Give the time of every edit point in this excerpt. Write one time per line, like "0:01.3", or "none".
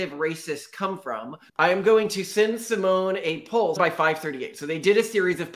0:01.5
0:03.8